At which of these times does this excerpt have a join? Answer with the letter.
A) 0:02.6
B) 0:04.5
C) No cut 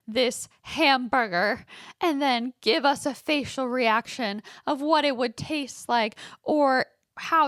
C